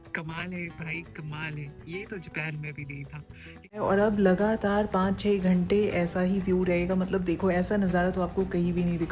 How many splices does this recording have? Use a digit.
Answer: 1